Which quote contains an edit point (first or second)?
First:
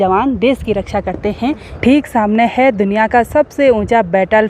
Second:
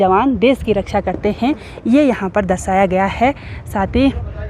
first